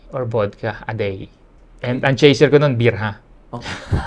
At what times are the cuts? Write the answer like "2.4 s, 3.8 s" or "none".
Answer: none